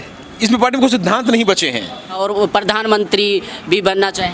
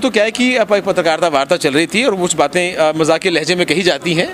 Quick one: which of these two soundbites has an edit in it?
first; 1 cut; at 2.1 s

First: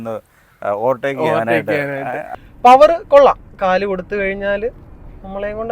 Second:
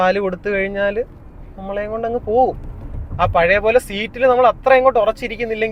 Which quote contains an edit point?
first; 1 cut; at 2.2 s

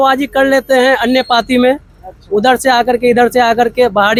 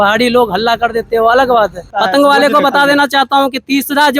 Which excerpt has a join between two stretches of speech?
second; 1 cut; at 1.9 s

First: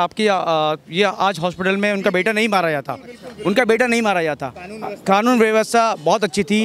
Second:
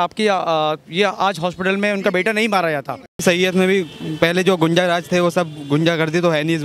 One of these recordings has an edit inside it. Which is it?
second; 1 cut; at 3.2 s

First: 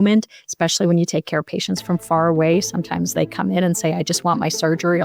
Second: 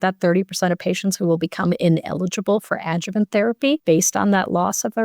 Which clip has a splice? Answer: second; 1 cut; at 3.8 s

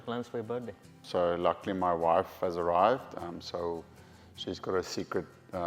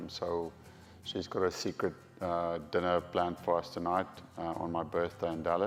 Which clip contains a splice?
first; 1 cut; at 1.0 s

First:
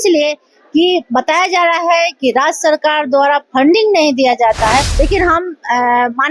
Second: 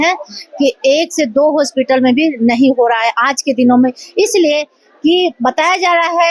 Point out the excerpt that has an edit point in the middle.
first; 1 cut; at 4.9 s

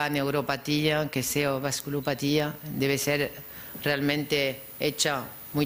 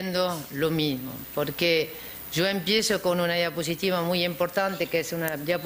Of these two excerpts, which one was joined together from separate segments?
second; 1 cut; at 1.1 s

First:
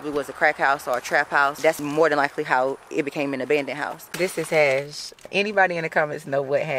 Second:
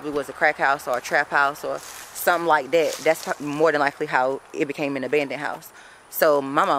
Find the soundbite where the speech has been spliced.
first; 3 cuts; at 1.8 s, 4.0 s, 5.3 s

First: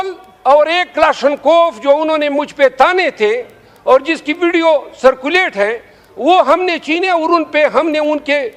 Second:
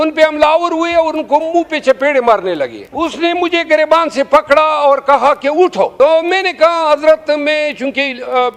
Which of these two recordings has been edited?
second; 2 cuts; at 2.8 s, 5.9 s

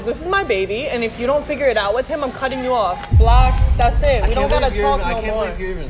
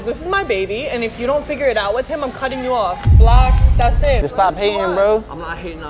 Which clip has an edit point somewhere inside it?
second; 1 cut; at 4.2 s

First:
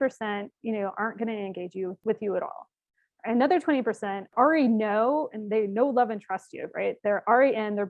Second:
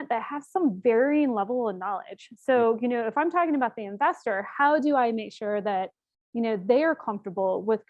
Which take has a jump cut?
first; 2 cuts; at 2.0 s, 4.3 s

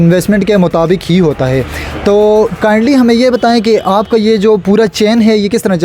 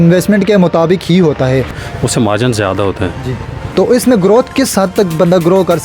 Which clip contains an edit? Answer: second; 2 cuts; at 1.8 s, 3.7 s

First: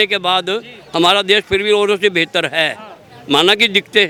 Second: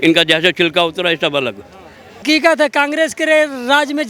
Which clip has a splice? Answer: second; 1 cut; at 2.2 s

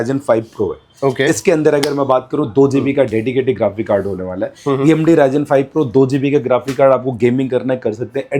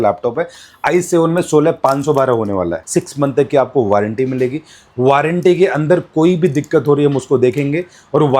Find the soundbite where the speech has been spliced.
second; 1 cut; at 2.8 s

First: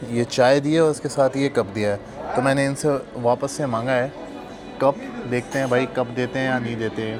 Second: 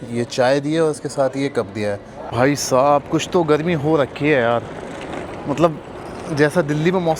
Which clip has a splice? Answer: second; 1 cut; at 2.2 s

